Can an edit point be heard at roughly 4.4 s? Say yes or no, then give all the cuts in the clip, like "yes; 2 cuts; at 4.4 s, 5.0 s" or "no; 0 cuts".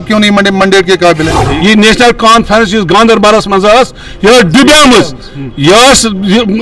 no; 1 cut; at 1.4 s